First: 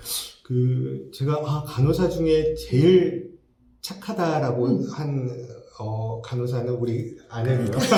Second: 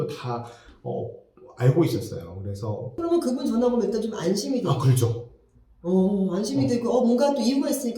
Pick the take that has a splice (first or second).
second